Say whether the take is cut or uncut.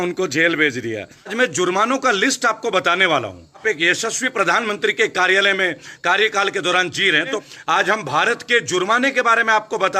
cut